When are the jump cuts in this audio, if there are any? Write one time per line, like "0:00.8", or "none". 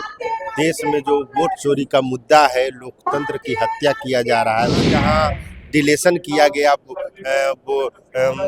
0:05.0